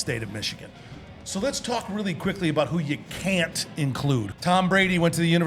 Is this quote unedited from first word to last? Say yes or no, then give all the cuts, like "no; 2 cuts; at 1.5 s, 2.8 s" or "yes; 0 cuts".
no; 1 cut; at 4.3 s